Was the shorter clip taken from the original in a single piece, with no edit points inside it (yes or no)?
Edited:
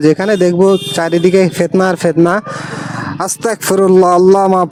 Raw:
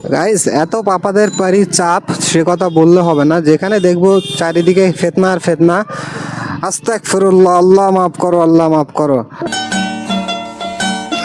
yes